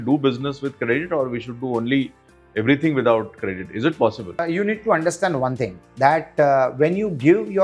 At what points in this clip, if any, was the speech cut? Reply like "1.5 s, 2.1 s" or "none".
4.4 s